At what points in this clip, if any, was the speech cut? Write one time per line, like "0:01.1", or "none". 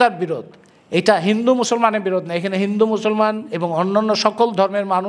none